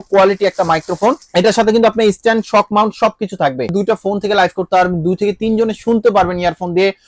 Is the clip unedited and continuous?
no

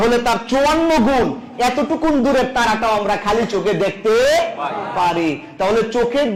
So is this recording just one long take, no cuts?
yes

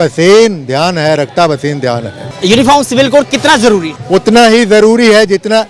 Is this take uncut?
no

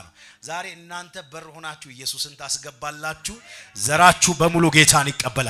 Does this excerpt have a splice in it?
no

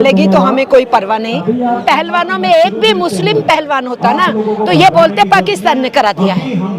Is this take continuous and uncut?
no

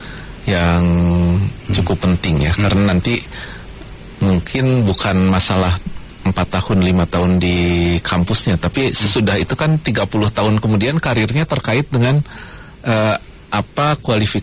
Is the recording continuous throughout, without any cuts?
yes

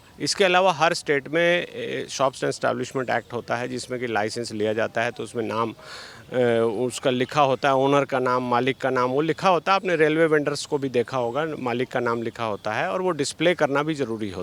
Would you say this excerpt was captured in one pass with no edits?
yes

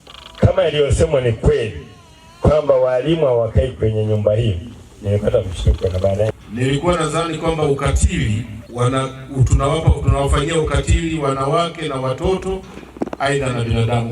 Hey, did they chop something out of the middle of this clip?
yes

